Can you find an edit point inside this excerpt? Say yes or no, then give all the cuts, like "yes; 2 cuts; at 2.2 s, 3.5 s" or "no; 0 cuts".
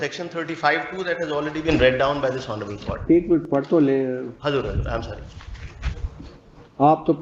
no; 0 cuts